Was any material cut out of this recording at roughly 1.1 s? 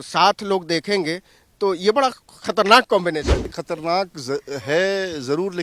no; 1 cut; at 3.5 s

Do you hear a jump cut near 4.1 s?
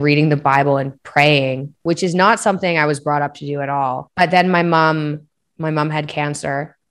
yes; 1 cut; at 4.1 s

